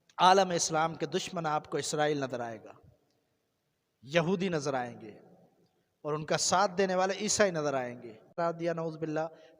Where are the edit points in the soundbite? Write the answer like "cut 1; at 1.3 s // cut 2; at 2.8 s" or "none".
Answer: cut 1; at 8.3 s